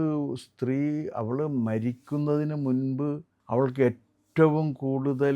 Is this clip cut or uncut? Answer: cut